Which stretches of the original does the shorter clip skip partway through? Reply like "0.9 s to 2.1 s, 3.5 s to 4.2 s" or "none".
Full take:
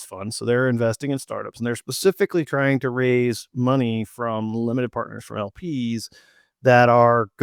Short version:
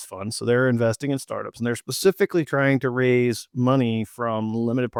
none

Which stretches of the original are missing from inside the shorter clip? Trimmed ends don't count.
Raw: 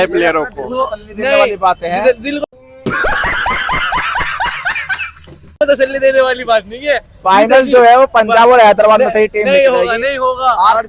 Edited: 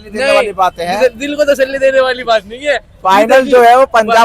2.4 s to 5.5 s

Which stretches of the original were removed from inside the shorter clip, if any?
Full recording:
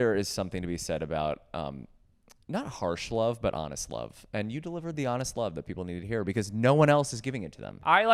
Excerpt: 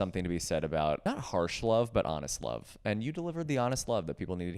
1.4 s to 2.5 s

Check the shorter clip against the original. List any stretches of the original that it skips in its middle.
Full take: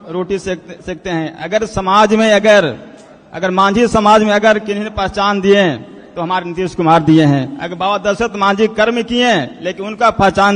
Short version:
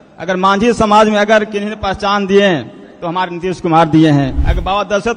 none

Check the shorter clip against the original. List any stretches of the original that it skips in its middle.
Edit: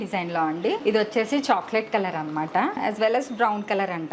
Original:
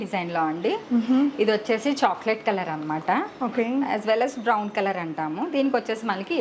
0.8 s to 1.3 s, 3.3 s to 3.9 s

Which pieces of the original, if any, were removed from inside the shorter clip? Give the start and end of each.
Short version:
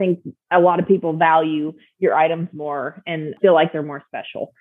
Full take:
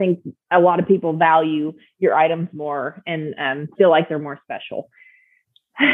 3.3 s to 3.7 s

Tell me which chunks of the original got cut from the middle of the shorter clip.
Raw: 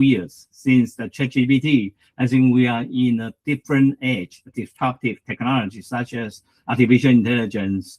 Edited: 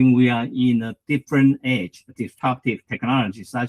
none

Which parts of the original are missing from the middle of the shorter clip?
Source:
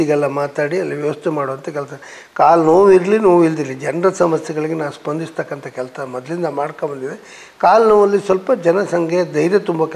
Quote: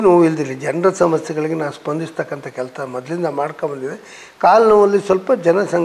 none

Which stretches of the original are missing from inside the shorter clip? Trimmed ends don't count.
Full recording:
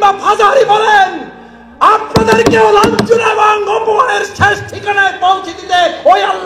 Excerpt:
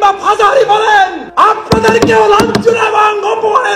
1.2 s to 1.7 s

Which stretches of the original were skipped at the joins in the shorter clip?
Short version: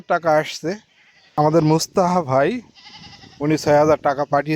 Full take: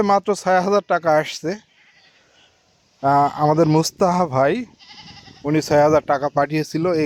2.1 s to 3.4 s

